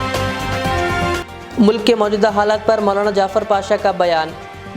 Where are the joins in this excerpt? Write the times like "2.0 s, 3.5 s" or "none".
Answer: 0.9 s